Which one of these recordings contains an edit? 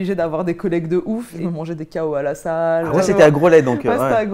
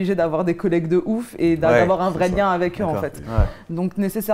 first; 2 cuts; at 1.3 s, 3.1 s

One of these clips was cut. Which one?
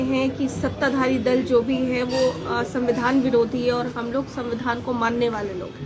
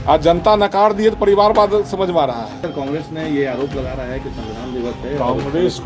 second; 1 cut; at 2.6 s

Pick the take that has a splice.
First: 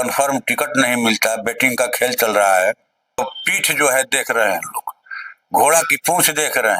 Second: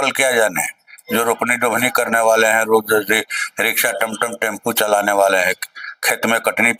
first; 1 cut; at 3.2 s

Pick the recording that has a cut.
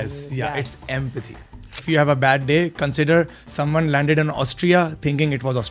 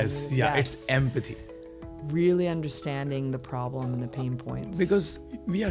first; 1 cut; at 1.7 s

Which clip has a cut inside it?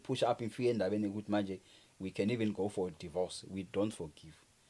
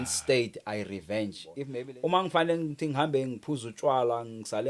second; 1 cut; at 1.6 s

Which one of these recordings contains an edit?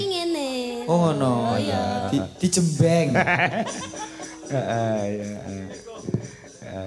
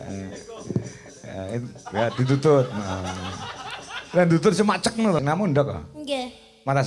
second; 1 cut; at 5.2 s

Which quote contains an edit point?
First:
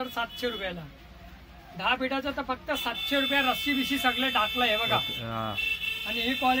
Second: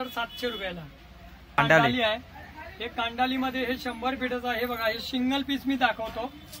second; 1 cut; at 1.6 s

